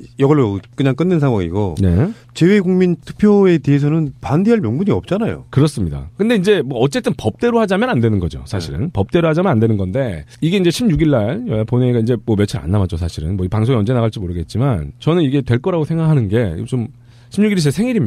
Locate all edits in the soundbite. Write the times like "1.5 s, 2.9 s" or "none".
none